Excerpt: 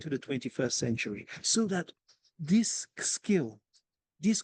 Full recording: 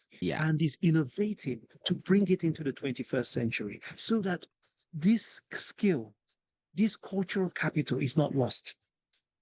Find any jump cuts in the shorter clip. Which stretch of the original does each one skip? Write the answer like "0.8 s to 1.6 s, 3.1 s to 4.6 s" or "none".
none